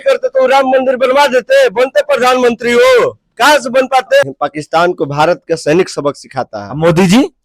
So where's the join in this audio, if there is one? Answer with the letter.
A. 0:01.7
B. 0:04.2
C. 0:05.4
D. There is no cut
B